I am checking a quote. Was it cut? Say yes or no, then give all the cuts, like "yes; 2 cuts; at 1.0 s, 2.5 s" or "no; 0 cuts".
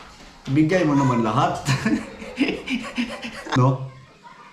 yes; 1 cut; at 3.5 s